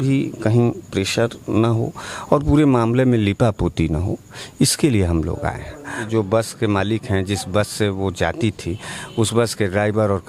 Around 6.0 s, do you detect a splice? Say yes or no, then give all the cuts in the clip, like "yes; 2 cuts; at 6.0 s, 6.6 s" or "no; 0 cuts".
yes; 1 cut; at 6.0 s